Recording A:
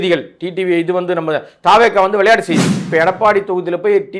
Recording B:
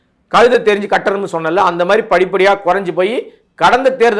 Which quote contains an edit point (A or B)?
A